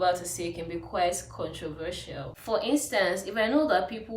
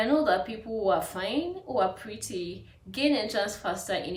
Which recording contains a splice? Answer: first; 1 cut; at 2.4 s

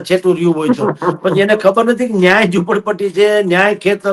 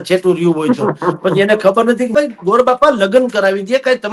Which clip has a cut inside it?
second; 1 cut; at 2.1 s

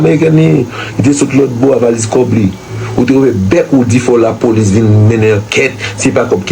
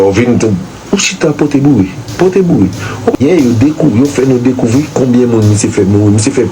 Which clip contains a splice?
second; 1 cut; at 3.2 s

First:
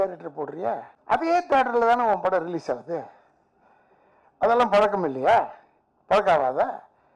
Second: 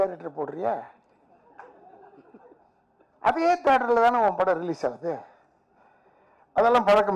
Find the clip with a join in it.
first; 1 cut; at 0.9 s

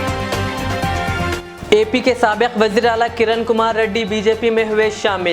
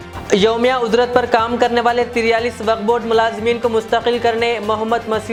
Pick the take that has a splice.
first; 1 cut; at 1.4 s

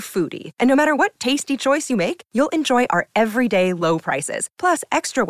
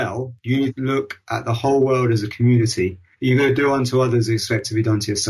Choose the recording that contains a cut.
second; 2 cuts; at 0.8 s, 3.1 s

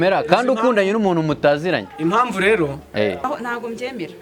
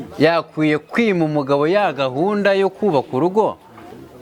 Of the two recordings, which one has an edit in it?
first; 1 cut; at 3.2 s

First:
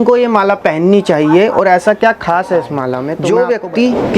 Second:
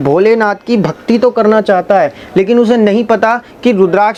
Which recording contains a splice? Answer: first; 1 cut; at 3.1 s

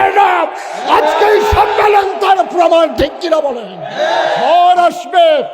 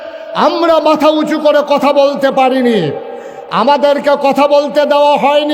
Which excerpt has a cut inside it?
first; 1 cut; at 4.4 s

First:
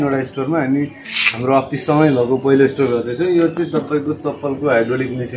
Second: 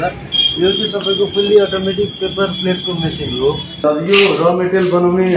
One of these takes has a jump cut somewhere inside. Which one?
second; 1 cut; at 3.8 s

